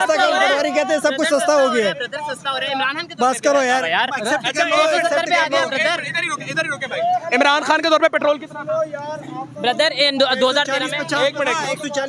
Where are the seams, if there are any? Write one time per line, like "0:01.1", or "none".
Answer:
none